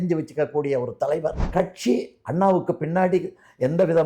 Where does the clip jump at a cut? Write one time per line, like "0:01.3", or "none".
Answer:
0:01.5